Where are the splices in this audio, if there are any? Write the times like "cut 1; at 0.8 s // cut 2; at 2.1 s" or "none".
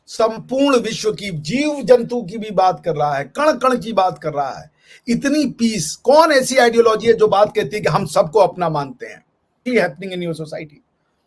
cut 1; at 9.6 s